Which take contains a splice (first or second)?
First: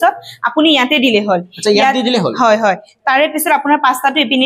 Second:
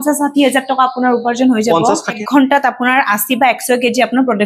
second